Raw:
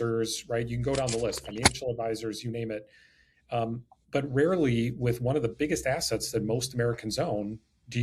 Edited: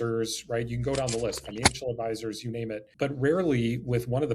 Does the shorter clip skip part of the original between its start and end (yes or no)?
yes